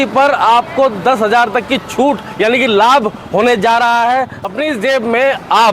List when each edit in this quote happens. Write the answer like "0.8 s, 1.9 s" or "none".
4.4 s